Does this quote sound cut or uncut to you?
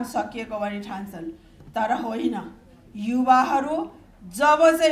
uncut